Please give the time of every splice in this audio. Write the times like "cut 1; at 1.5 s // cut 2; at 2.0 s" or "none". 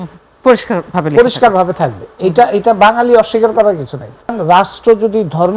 cut 1; at 4.4 s